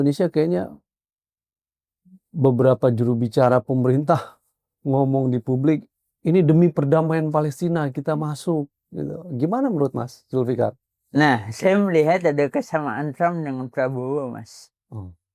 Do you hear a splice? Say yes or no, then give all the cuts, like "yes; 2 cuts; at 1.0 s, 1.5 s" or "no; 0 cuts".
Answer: no; 0 cuts